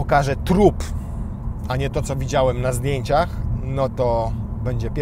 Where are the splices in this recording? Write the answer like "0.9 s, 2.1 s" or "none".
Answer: none